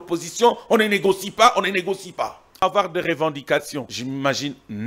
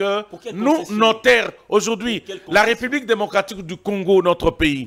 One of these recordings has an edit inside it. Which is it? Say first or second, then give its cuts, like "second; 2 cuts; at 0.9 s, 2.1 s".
first; 2 cuts; at 2.6 s, 3.9 s